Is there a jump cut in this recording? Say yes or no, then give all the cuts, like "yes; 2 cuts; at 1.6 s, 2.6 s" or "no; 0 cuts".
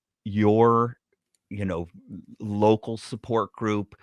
no; 0 cuts